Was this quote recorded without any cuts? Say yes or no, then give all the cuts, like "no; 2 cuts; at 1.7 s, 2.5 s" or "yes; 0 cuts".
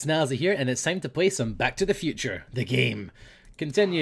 yes; 0 cuts